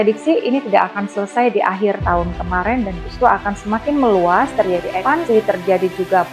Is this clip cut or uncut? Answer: cut